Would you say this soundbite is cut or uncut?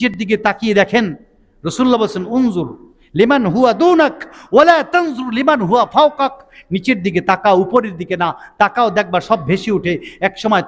uncut